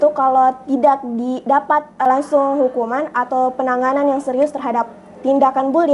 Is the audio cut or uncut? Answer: cut